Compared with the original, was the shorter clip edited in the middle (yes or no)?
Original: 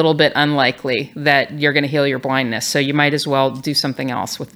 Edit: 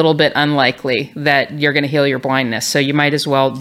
no